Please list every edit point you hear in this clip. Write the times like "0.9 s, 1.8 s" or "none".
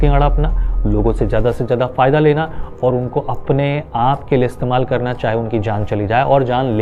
none